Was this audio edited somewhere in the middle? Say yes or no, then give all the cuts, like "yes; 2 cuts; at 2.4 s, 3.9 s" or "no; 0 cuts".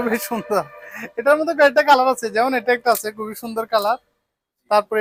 no; 0 cuts